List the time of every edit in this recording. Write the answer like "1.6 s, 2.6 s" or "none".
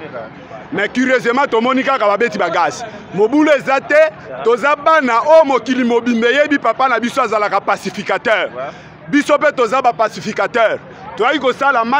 none